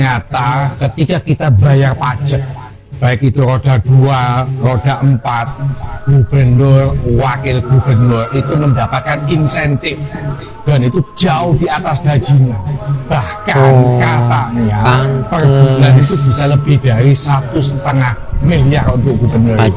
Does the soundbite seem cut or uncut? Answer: uncut